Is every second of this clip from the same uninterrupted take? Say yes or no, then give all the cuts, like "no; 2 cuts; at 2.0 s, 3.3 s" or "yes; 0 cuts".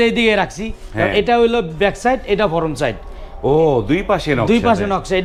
yes; 0 cuts